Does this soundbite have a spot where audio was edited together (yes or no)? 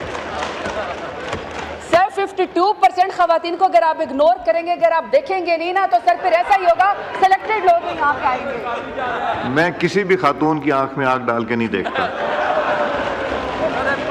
no